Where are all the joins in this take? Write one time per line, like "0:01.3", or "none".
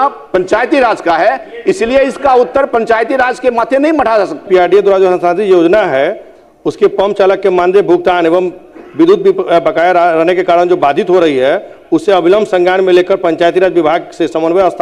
0:04.4